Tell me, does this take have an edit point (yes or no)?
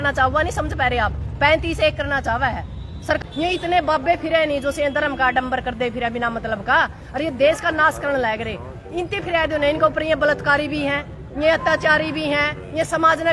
yes